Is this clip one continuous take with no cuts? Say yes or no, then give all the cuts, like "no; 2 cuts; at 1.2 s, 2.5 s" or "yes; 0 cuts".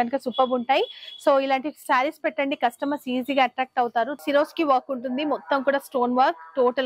no; 1 cut; at 4.2 s